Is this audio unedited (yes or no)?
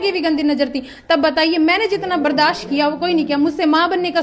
yes